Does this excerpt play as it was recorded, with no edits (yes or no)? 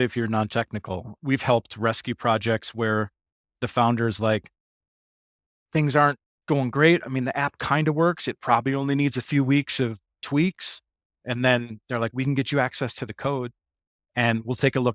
no